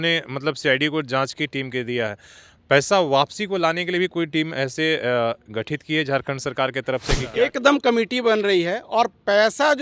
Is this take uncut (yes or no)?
no